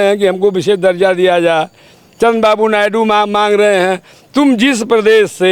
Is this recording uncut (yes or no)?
yes